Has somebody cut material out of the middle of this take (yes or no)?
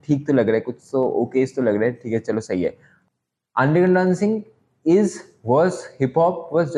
yes